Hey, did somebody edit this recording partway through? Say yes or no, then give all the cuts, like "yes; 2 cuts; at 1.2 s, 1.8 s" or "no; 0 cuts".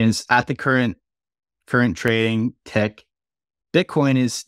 no; 0 cuts